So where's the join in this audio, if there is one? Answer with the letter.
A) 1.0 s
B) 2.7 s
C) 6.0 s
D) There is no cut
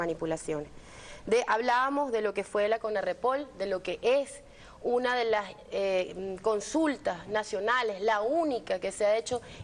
C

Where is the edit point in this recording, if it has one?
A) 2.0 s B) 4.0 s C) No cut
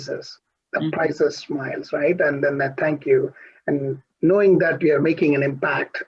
C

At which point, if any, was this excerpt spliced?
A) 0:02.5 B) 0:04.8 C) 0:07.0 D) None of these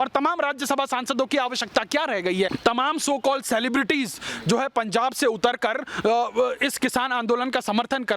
A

